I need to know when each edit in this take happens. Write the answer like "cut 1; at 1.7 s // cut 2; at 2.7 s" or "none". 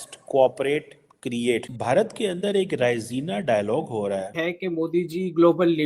cut 1; at 4.5 s